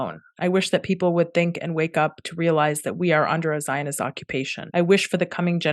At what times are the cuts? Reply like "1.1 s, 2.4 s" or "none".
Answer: 4.6 s